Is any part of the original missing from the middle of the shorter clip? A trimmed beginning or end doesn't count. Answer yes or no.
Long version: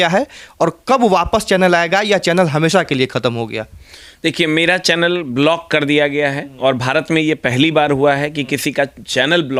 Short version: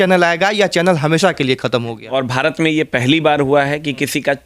yes